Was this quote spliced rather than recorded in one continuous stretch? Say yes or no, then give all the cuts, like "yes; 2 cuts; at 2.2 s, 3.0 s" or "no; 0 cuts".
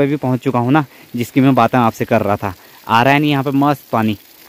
no; 0 cuts